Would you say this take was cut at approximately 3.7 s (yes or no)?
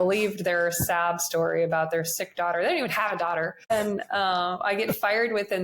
yes